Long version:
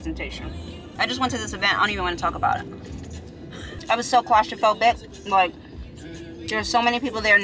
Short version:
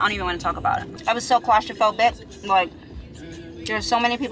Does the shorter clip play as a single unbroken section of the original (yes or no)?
no